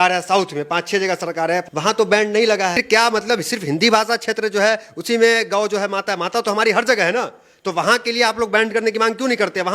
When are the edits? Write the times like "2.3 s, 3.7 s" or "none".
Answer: 1.6 s, 2.8 s